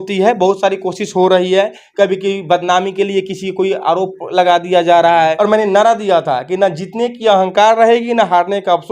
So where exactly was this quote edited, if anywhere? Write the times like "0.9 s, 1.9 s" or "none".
5.3 s